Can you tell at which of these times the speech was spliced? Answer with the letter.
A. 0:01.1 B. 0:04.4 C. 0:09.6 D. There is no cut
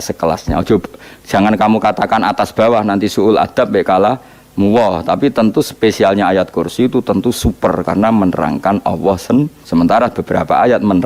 C